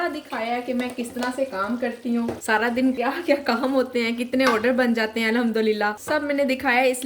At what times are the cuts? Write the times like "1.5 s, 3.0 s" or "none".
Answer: 2.4 s, 3.0 s, 6.0 s